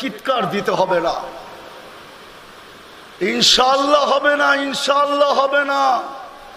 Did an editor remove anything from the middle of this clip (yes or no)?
no